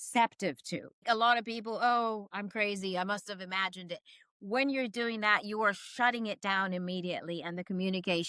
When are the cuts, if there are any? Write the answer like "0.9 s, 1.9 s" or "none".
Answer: 1.0 s

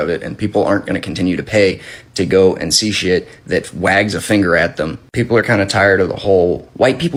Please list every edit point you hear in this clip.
none

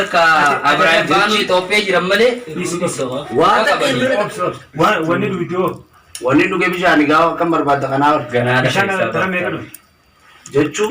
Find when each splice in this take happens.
4.1 s

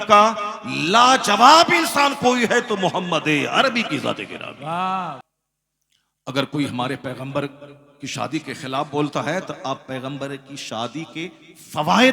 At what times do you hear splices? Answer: 5.2 s

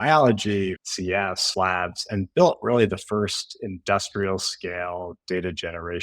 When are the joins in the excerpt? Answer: 1.4 s

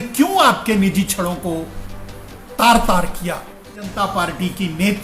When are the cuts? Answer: 3.9 s

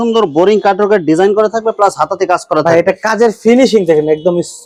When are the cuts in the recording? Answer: none

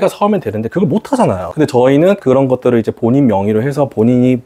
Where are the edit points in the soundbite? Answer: 1.4 s

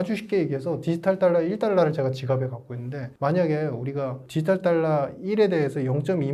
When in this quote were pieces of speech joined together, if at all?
none

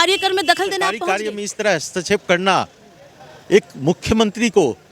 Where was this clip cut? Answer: 1.0 s

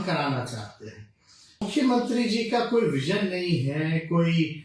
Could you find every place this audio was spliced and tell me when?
1.7 s

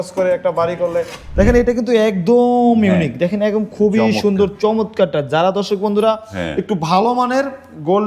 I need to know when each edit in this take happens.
1.2 s

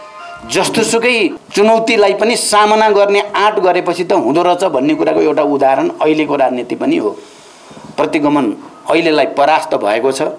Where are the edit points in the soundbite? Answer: 1.4 s

